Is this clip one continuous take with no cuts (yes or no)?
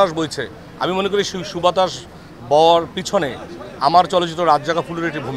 yes